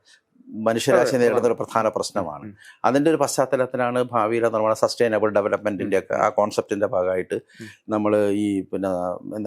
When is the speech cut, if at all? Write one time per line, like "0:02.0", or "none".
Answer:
none